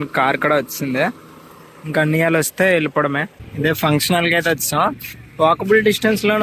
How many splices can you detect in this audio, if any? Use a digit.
0